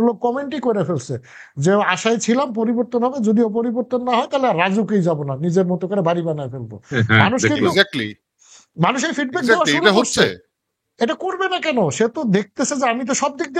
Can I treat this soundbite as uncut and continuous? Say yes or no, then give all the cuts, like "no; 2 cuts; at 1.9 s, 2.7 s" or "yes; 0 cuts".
yes; 0 cuts